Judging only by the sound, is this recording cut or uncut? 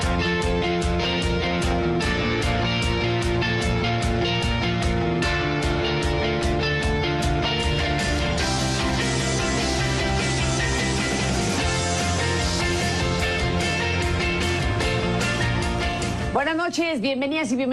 uncut